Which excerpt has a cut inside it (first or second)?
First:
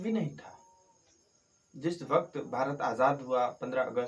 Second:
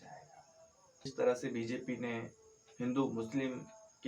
second